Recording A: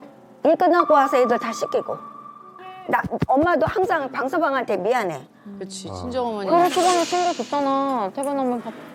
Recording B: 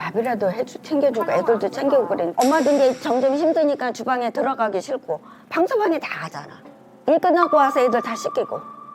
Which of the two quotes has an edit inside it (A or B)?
B